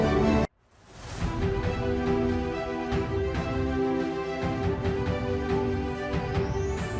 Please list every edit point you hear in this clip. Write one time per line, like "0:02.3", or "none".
none

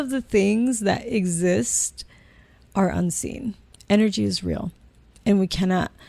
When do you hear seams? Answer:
0:03.7

